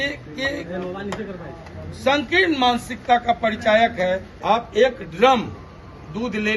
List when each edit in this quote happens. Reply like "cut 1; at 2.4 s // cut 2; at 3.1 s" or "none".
cut 1; at 4.3 s